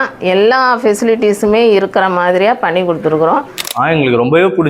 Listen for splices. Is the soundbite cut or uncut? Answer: cut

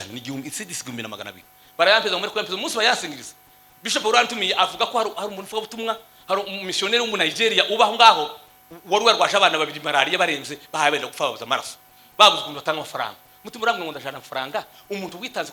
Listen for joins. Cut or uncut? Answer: uncut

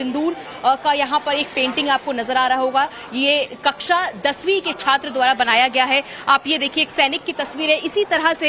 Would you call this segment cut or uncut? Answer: uncut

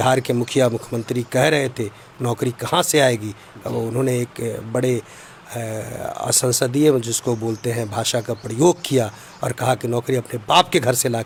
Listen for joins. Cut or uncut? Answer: uncut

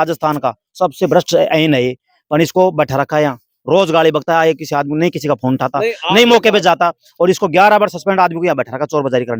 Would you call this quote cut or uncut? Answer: uncut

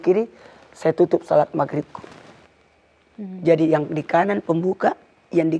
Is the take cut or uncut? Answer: uncut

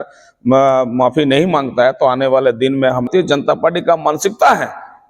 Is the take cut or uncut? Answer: cut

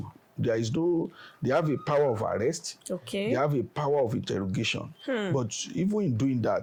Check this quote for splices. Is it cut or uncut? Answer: uncut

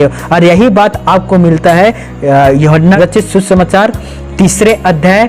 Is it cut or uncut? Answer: cut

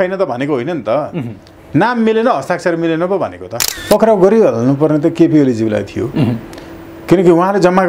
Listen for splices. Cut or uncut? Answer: cut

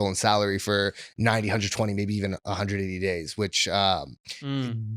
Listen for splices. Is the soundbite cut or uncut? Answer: uncut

